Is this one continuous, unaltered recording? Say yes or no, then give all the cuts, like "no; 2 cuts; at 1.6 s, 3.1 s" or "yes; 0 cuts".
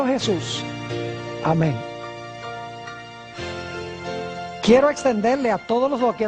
no; 1 cut; at 1.4 s